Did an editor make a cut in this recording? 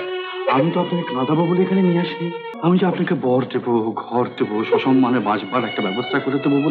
yes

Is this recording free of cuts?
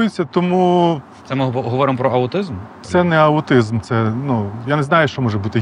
no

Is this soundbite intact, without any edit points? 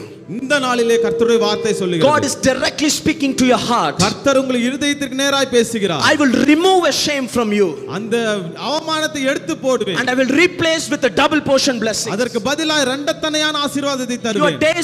yes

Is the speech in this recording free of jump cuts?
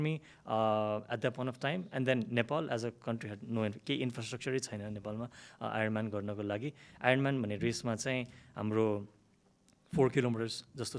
yes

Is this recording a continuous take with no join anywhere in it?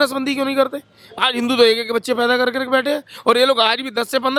yes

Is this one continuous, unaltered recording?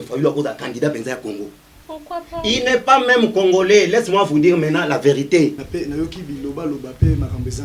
no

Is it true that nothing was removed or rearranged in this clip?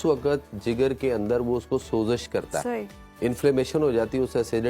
yes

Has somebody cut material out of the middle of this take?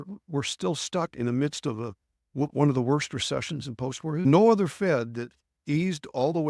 yes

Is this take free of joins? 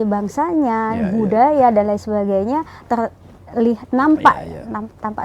yes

